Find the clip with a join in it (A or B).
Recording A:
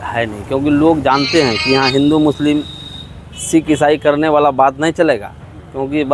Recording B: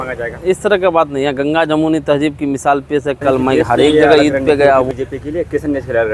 B